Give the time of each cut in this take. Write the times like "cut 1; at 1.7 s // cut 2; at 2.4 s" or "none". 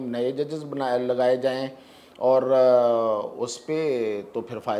none